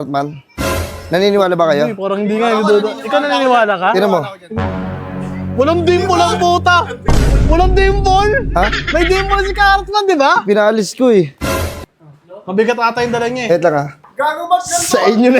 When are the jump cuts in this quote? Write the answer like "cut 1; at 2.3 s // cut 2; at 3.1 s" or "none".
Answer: cut 1; at 11.7 s